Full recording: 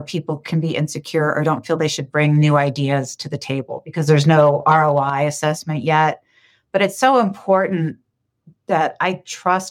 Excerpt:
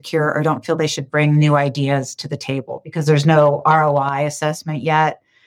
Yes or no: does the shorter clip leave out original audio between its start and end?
no